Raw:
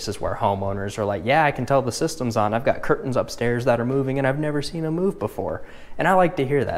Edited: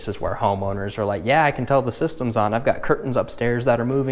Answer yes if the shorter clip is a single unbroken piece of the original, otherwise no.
yes